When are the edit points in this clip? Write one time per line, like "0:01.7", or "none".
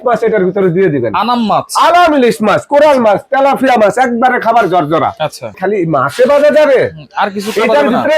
0:05.5